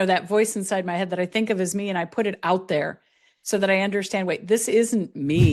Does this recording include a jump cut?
no; 0 cuts

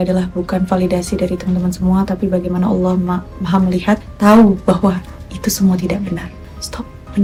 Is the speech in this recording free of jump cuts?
yes; 0 cuts

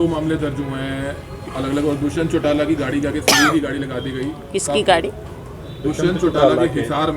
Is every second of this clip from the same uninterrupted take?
yes; 0 cuts

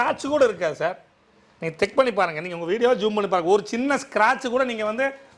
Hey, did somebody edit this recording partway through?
no; 0 cuts

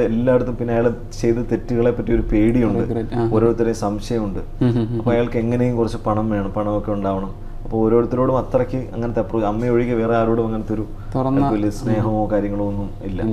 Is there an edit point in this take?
no; 0 cuts

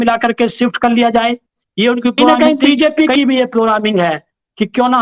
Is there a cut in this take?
yes; 1 cut; at 2.3 s

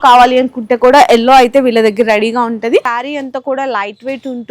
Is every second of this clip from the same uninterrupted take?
no; 1 cut; at 2.9 s

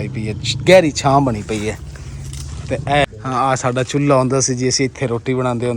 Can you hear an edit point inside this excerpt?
yes; 1 cut; at 3.1 s

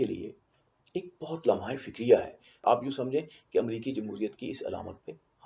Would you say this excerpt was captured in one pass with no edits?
no; 1 cut; at 2.6 s

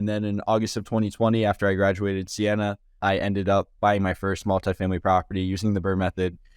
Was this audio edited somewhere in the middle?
no; 0 cuts

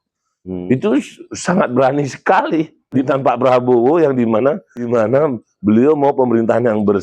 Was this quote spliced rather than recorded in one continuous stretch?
yes; 2 cuts; at 3.0 s, 5.0 s

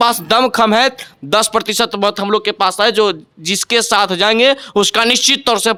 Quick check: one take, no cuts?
yes; 0 cuts

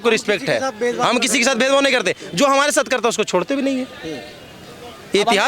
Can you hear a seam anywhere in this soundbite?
no; 0 cuts

